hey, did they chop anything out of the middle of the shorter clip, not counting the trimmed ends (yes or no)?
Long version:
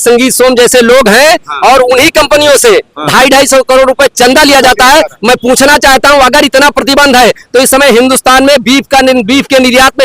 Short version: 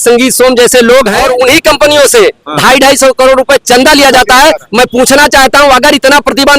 yes